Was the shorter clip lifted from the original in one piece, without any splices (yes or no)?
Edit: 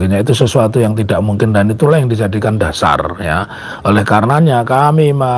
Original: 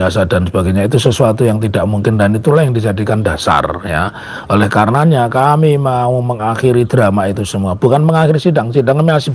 yes